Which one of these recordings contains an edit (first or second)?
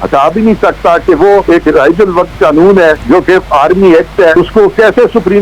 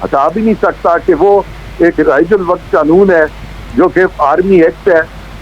first